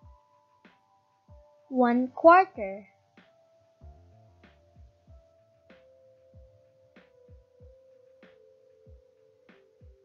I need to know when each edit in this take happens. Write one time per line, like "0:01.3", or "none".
none